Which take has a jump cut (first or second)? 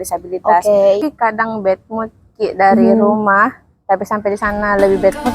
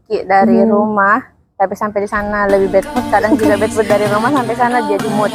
first